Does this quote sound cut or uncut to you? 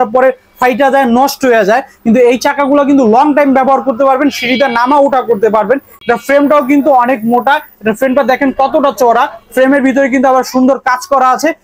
uncut